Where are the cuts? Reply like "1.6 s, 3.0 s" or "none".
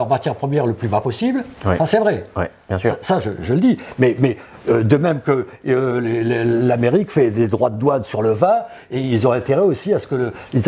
none